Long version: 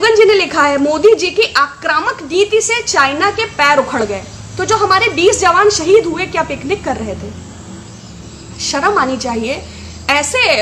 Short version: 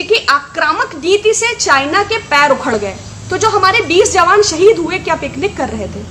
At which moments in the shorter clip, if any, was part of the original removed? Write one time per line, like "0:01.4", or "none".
none